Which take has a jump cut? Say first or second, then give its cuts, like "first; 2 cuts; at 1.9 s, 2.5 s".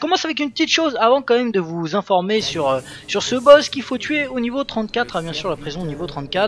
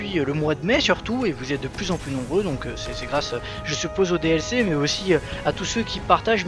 second; 1 cut; at 2.9 s